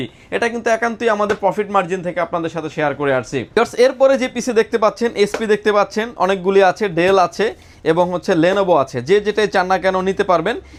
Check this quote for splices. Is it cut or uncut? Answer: uncut